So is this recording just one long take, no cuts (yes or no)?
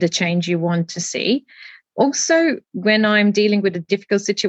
yes